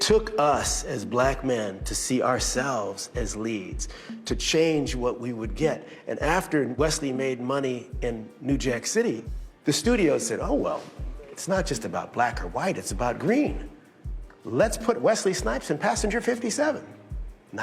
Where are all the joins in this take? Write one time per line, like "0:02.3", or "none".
0:14.8